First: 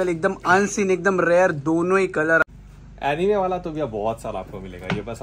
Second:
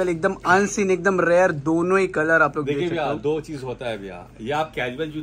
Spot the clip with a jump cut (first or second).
first